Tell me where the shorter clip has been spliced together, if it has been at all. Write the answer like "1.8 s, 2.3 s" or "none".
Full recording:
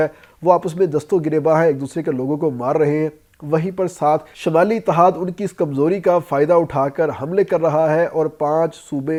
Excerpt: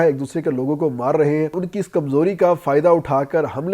1.6 s